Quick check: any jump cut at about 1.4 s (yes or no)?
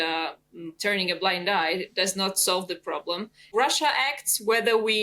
no